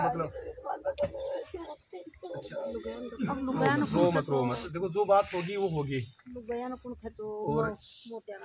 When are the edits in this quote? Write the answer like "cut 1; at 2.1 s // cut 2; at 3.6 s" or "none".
none